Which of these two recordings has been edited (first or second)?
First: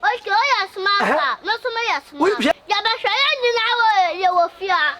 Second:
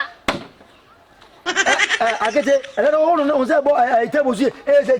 first